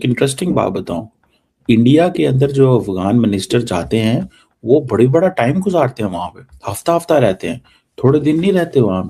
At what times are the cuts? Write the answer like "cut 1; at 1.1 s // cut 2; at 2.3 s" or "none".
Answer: none